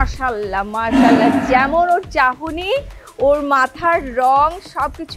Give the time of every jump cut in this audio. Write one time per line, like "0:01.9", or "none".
none